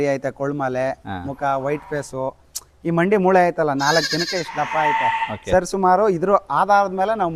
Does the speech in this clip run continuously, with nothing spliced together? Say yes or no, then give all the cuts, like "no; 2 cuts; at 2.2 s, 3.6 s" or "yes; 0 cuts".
yes; 0 cuts